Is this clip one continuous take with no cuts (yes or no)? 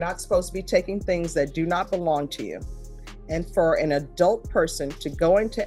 yes